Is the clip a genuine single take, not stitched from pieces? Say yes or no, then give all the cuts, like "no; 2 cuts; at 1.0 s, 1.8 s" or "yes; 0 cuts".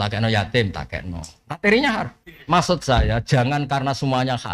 no; 1 cut; at 2.1 s